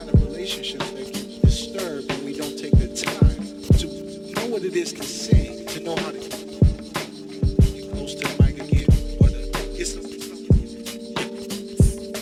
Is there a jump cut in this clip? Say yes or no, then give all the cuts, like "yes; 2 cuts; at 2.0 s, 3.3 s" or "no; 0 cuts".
no; 0 cuts